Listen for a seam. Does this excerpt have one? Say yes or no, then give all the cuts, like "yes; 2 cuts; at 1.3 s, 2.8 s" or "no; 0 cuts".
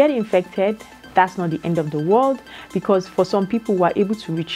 no; 0 cuts